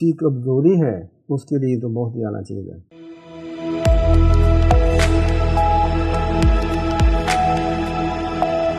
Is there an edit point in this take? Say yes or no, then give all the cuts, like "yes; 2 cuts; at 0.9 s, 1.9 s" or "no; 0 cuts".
no; 0 cuts